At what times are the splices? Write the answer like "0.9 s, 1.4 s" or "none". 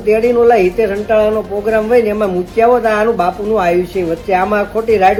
none